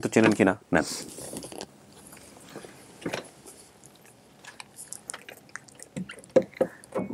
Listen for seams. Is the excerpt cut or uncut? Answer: uncut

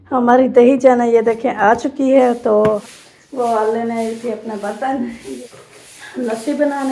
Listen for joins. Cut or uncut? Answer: cut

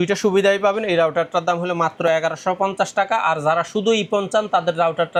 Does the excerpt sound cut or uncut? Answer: uncut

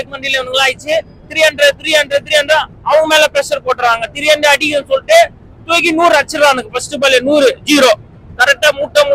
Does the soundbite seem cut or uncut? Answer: uncut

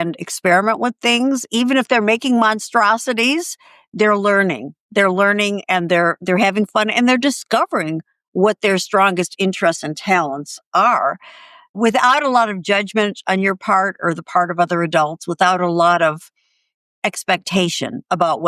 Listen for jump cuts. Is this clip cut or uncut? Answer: uncut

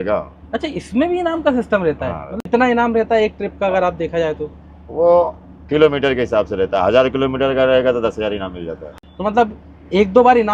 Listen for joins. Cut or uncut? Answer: uncut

